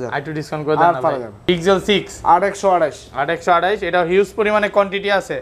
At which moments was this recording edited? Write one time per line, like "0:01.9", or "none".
0:01.3